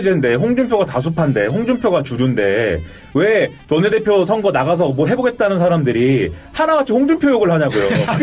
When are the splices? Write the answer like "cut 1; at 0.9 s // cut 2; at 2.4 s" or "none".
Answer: none